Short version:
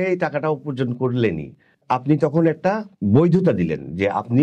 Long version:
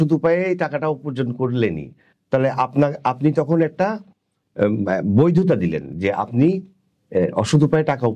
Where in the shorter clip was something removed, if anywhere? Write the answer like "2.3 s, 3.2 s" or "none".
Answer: 1.8 s, 3.0 s